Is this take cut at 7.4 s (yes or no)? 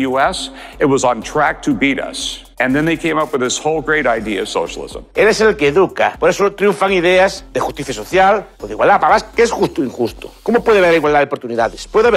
no